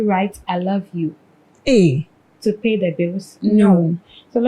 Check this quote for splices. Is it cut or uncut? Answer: uncut